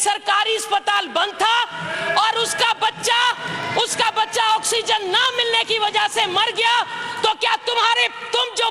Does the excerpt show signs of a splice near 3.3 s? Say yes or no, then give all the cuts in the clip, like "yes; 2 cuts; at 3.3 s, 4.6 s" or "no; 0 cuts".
no; 0 cuts